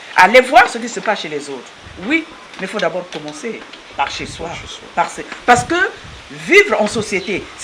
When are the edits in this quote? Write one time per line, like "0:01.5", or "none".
none